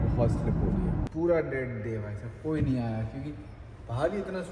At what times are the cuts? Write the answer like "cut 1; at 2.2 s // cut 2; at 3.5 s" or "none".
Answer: cut 1; at 1.1 s